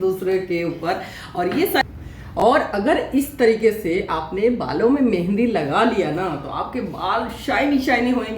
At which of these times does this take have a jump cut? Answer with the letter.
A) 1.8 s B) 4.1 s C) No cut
A